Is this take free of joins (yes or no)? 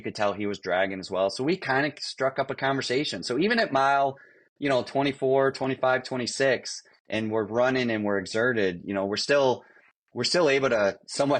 yes